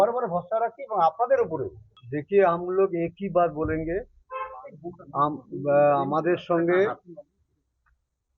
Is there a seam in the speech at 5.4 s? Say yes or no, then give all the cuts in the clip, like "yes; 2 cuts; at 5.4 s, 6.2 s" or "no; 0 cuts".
no; 1 cut; at 1.8 s